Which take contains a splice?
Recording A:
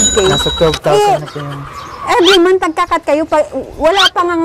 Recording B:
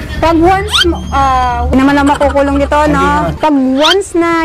B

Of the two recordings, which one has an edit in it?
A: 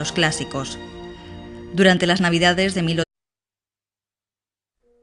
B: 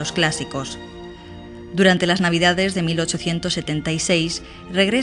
B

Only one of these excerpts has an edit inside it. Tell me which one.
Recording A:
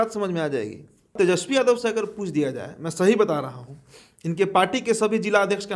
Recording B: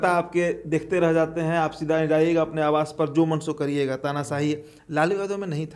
A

